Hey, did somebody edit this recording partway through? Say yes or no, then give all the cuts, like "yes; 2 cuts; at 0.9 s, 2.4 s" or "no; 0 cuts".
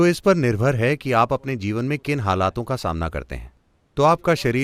no; 0 cuts